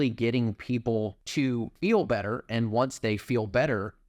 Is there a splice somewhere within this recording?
yes; 1 cut; at 1.6 s

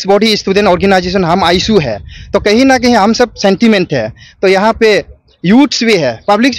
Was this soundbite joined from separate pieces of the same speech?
no; 0 cuts

